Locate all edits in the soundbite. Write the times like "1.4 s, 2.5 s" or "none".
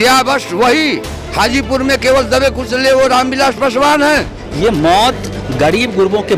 4.4 s